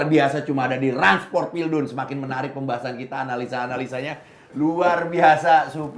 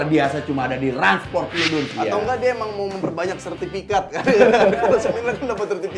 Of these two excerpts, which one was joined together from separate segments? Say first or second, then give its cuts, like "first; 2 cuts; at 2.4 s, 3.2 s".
second; 1 cut; at 1.9 s